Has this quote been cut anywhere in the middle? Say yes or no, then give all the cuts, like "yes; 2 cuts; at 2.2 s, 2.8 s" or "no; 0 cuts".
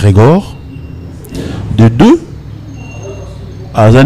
no; 0 cuts